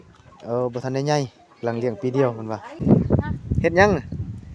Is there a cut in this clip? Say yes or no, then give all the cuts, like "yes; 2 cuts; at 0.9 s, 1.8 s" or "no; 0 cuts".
yes; 1 cut; at 2.7 s